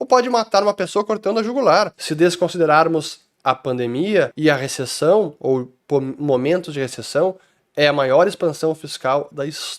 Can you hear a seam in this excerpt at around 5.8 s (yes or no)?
no